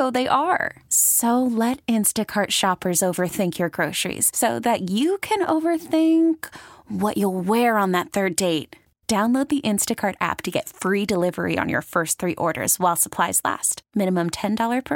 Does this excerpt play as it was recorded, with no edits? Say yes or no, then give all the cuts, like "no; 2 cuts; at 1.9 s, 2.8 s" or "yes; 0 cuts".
yes; 0 cuts